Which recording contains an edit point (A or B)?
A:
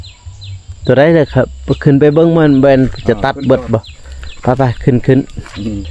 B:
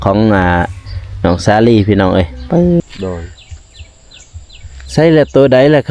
B